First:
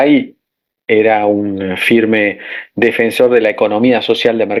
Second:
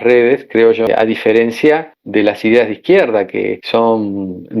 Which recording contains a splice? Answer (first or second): second